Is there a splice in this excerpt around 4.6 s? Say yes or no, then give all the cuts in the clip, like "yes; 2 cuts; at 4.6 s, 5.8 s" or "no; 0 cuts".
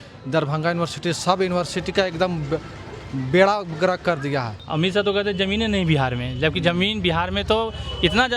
yes; 1 cut; at 4.6 s